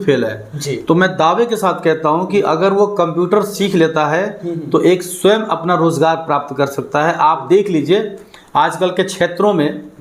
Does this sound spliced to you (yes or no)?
no